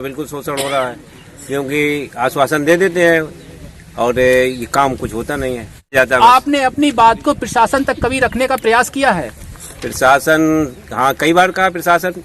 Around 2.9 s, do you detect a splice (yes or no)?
no